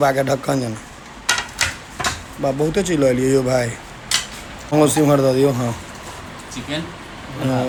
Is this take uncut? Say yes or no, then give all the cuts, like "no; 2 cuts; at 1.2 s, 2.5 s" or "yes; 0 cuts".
yes; 0 cuts